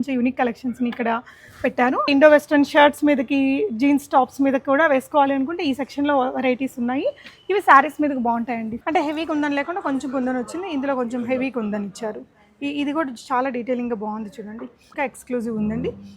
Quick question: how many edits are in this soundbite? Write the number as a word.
three